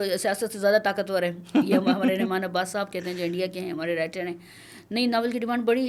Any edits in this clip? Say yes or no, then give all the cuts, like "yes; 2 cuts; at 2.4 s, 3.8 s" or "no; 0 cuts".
no; 0 cuts